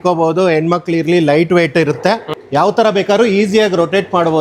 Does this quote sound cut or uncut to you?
cut